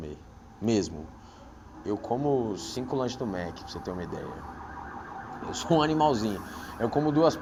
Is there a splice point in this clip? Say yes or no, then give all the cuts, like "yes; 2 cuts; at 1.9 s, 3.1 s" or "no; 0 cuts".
no; 0 cuts